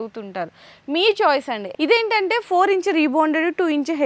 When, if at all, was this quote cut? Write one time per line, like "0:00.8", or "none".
0:01.7